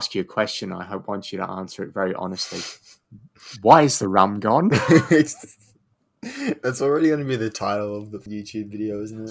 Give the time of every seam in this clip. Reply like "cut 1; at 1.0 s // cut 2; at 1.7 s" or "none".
cut 1; at 8.3 s